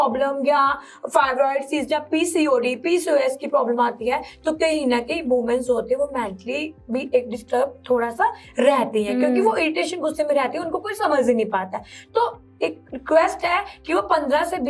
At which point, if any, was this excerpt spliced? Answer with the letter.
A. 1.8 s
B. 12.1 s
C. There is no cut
C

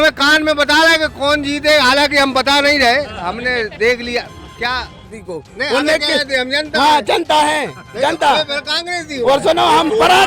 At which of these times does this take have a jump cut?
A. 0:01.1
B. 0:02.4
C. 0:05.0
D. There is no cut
C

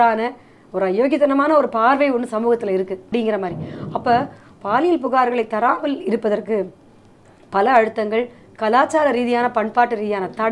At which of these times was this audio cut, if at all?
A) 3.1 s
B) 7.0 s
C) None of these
A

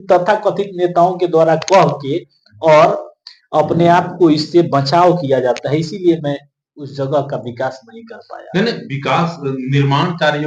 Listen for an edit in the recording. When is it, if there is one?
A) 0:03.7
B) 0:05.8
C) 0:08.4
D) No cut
D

